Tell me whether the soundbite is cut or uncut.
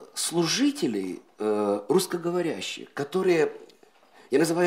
uncut